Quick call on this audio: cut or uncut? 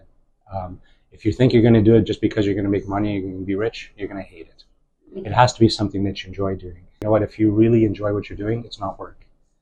cut